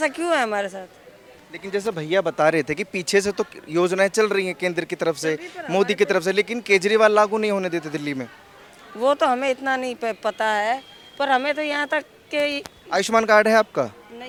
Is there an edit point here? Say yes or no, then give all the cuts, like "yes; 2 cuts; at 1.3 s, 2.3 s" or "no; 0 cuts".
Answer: no; 0 cuts